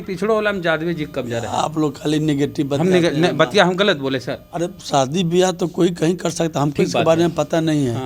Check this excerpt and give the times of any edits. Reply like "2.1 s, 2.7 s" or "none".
none